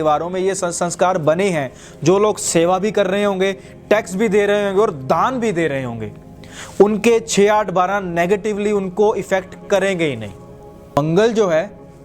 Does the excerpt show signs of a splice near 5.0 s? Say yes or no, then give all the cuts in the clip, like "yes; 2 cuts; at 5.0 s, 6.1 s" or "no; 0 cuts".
no; 1 cut; at 11.0 s